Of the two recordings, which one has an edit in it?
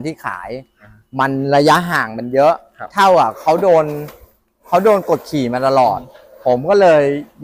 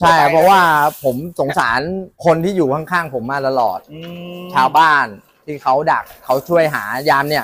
second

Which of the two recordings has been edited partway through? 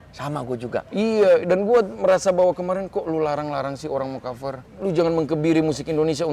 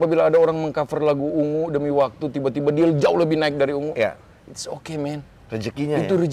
first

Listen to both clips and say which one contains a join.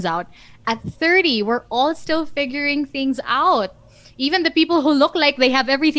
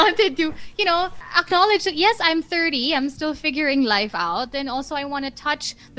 second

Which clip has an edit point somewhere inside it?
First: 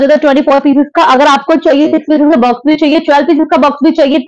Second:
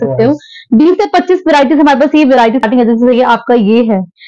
second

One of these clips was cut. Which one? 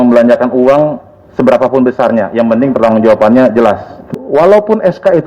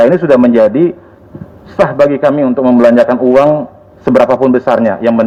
first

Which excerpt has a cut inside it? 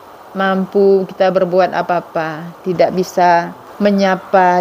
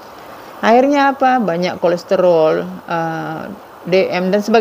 first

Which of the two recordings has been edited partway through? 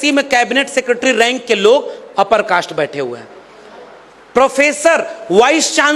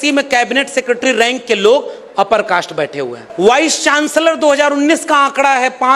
second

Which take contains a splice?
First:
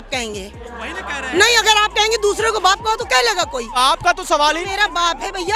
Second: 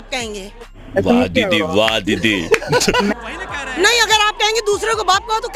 first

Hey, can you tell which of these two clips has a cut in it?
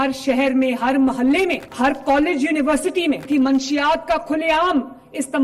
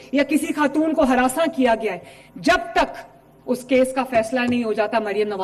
first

